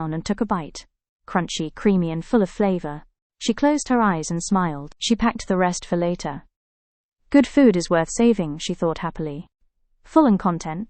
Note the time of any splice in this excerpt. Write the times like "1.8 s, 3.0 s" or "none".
none